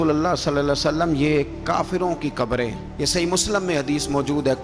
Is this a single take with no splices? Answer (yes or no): yes